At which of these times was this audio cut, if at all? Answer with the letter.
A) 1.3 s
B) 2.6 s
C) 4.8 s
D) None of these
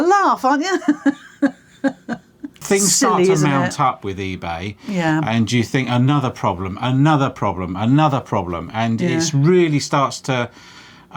B